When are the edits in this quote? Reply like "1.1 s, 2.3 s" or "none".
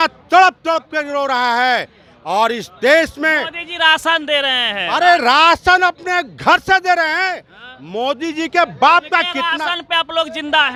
none